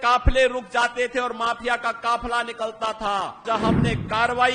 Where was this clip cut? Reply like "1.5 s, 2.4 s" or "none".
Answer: 3.4 s